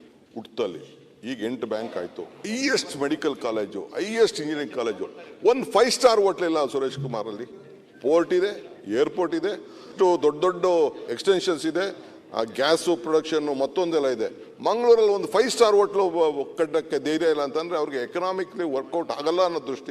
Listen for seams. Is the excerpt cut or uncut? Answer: cut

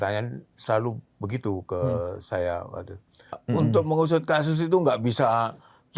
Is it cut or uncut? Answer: cut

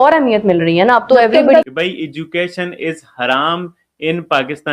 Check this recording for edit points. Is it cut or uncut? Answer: cut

